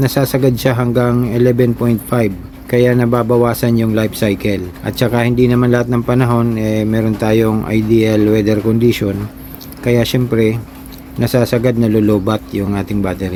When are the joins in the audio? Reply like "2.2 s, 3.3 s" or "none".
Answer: none